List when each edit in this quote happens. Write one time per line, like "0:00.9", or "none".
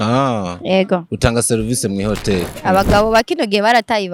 0:02.6